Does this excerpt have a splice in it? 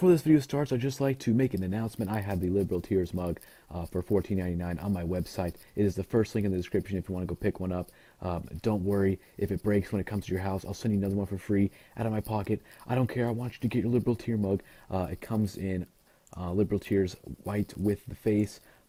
no; 0 cuts

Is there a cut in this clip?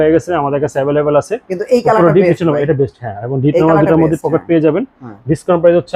no; 0 cuts

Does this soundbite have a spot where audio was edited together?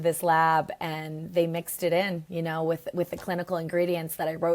no; 0 cuts

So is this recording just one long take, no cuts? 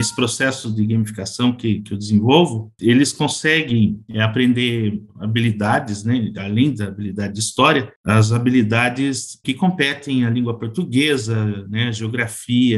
yes; 0 cuts

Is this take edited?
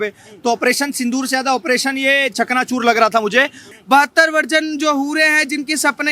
yes; 1 cut; at 3.7 s

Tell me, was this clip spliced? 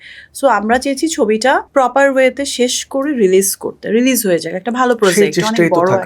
yes; 1 cut; at 1.7 s

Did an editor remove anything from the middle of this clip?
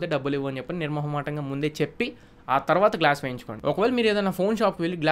yes; 1 cut; at 3.5 s

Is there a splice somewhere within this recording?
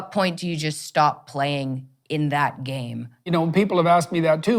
yes; 1 cut; at 3.3 s

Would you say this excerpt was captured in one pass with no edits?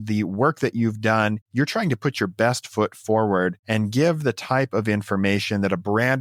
yes; 0 cuts

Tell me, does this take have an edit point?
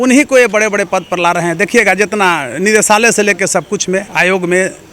no; 0 cuts

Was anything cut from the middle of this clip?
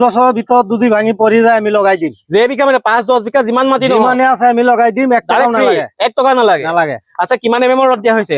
no; 0 cuts

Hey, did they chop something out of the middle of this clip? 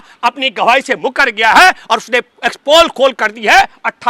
no; 0 cuts

